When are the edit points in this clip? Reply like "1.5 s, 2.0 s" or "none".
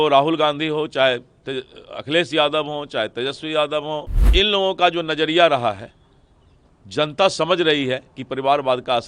4.1 s